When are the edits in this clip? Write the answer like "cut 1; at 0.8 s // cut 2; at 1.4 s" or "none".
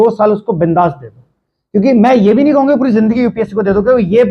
none